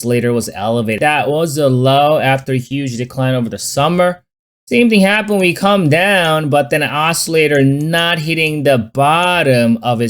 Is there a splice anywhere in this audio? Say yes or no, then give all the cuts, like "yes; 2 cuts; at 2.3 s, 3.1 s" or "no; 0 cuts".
yes; 1 cut; at 1.0 s